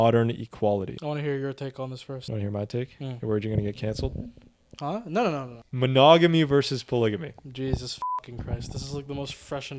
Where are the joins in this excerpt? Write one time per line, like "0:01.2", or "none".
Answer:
0:01.0
0:02.1
0:05.6